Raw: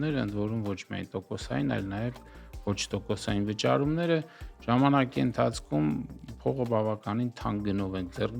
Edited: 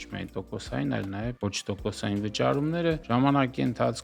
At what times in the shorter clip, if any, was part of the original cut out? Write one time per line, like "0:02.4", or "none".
0:01.3
0:03.0